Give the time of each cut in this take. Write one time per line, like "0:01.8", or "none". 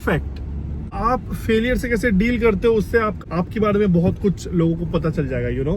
0:01.0
0:03.2